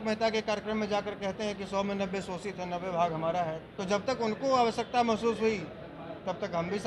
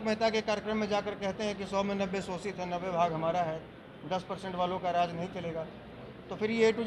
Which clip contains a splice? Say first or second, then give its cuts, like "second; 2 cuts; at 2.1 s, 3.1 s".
first; 1 cut; at 3.7 s